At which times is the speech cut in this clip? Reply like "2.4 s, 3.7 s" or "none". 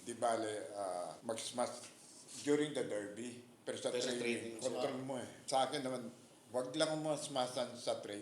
1.2 s